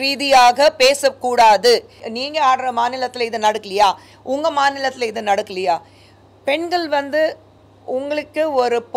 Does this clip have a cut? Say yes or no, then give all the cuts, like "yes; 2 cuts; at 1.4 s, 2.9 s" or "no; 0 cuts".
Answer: yes; 1 cut; at 2.1 s